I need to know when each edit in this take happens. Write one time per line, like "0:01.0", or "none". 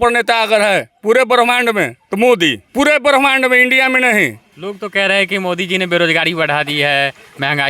0:02.0
0:02.6
0:04.5